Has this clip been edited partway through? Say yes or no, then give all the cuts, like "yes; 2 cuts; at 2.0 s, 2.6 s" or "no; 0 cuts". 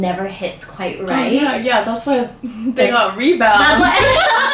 no; 0 cuts